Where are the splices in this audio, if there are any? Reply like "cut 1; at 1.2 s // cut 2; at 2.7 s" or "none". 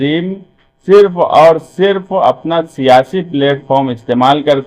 none